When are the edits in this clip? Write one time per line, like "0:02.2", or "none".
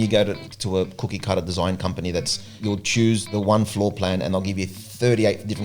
0:02.9